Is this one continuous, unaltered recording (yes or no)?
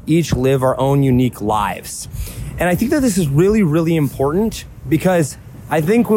yes